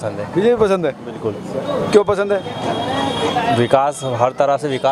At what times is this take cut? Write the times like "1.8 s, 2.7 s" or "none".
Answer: none